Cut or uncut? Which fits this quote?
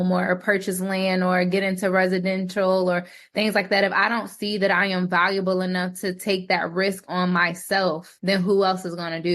cut